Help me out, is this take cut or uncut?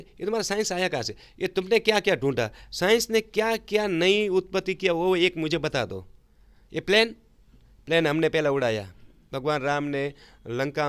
uncut